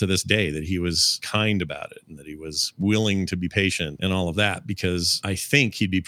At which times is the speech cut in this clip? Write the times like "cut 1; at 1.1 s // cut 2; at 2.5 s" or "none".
cut 1; at 1.2 s // cut 2; at 3.9 s // cut 3; at 5.1 s